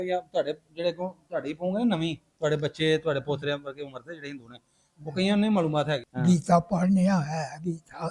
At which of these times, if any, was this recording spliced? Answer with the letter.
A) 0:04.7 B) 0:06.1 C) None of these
B